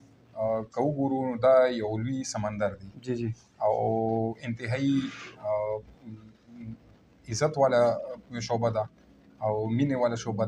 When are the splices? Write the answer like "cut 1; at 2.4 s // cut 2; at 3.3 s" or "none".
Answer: none